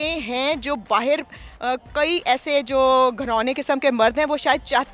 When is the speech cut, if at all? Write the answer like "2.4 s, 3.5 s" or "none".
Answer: none